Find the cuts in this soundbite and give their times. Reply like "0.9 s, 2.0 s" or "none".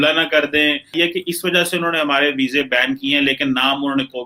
0.9 s